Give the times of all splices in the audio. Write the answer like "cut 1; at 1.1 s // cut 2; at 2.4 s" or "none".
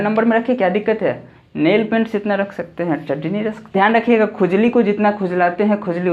cut 1; at 3.7 s